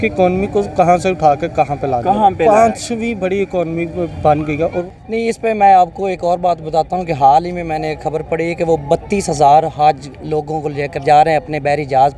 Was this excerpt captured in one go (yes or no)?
no